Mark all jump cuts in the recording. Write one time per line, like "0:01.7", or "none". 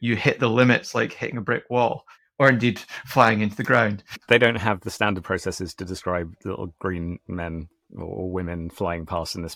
none